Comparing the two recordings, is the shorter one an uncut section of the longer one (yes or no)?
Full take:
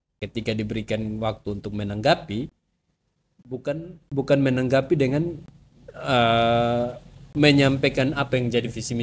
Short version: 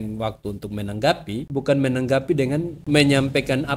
no